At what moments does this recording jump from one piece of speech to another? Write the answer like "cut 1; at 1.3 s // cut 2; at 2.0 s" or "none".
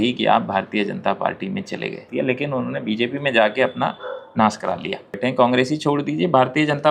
cut 1; at 2.1 s // cut 2; at 5.2 s